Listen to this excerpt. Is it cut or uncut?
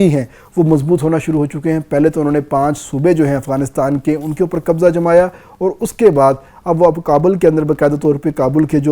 uncut